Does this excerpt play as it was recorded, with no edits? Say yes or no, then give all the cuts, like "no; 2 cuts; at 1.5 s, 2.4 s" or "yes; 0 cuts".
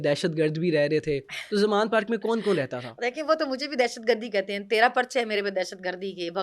yes; 0 cuts